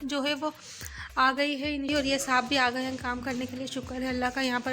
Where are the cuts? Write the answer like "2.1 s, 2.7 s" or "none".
1.9 s